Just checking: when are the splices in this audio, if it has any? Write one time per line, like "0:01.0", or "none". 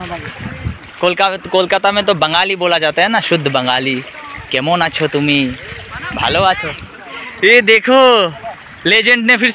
none